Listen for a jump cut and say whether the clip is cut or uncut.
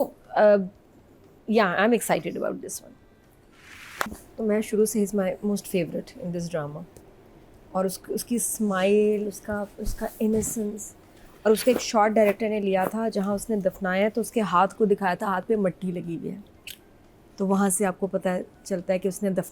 cut